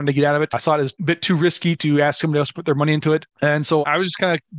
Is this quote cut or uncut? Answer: uncut